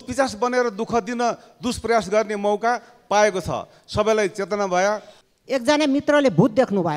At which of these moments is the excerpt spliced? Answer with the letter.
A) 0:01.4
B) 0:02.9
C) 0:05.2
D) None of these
C